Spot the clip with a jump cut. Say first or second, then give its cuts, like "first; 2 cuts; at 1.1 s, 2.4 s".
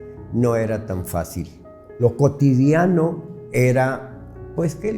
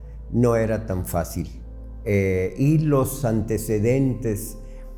first; 1 cut; at 2.0 s